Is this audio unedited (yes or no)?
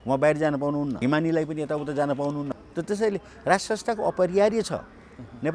no